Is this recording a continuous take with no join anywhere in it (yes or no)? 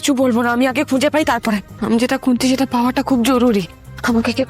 no